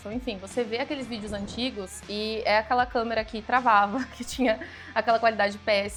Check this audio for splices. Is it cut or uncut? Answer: uncut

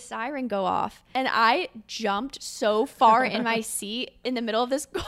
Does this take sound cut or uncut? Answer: cut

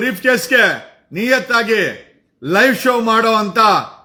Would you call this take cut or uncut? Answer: uncut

